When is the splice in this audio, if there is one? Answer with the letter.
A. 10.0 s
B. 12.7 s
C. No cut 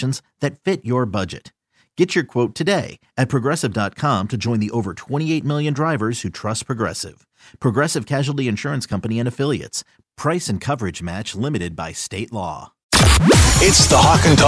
B